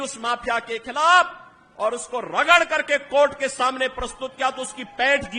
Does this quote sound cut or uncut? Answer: uncut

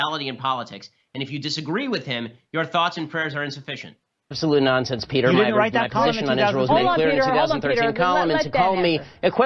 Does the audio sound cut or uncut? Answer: uncut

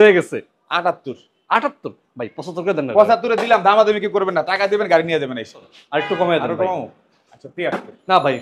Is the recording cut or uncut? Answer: cut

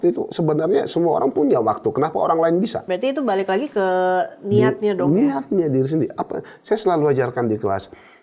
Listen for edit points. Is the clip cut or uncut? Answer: cut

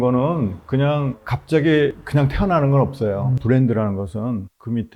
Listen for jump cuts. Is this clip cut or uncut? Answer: cut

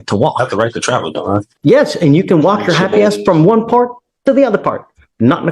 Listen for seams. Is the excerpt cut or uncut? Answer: cut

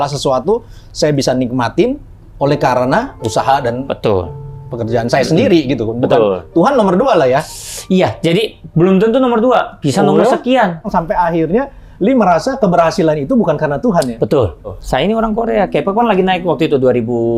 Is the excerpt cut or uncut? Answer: cut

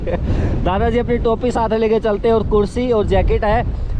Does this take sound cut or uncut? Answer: uncut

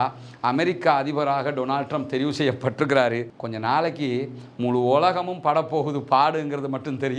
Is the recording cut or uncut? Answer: cut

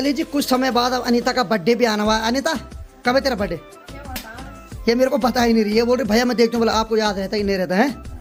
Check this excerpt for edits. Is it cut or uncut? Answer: uncut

